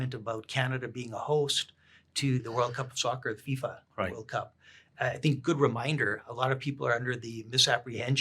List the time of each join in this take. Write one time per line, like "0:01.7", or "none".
0:02.5